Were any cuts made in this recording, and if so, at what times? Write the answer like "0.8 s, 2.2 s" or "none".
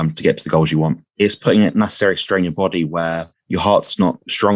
1.1 s, 3.3 s